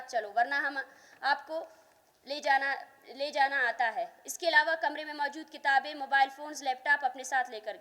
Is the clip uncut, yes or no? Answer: yes